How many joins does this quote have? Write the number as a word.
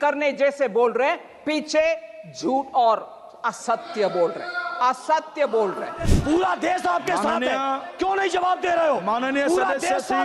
one